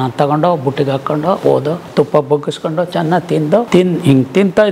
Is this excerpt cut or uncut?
cut